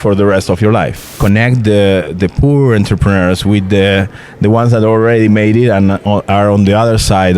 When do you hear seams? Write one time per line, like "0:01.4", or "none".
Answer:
0:01.0